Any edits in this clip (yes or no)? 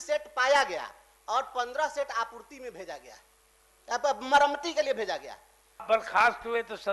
yes